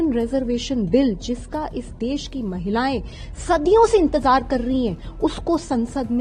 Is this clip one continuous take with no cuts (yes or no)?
yes